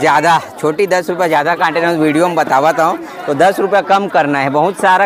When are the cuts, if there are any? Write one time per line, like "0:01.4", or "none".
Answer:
none